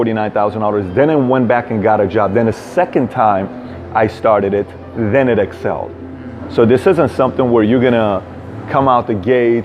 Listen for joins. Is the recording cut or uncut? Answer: uncut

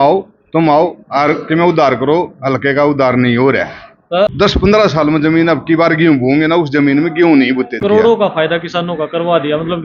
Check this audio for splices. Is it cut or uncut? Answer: cut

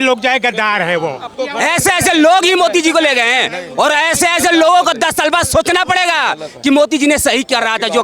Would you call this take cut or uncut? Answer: cut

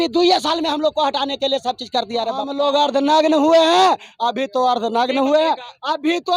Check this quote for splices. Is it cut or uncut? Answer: cut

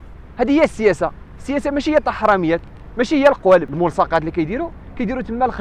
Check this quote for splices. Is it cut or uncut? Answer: cut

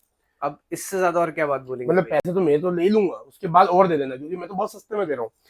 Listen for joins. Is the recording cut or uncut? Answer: uncut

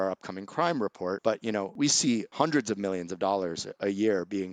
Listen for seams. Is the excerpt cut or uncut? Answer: uncut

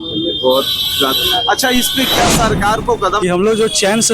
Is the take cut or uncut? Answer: cut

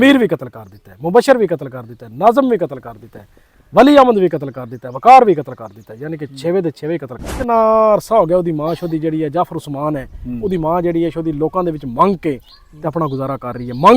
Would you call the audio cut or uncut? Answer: cut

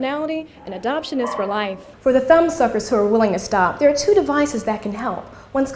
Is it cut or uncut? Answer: cut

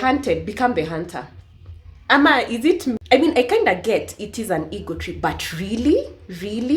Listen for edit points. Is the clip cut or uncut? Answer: cut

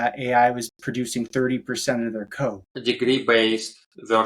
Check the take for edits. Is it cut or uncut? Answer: cut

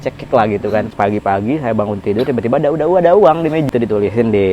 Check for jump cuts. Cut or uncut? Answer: cut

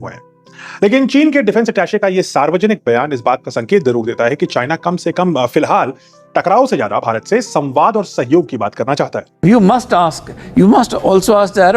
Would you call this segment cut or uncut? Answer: cut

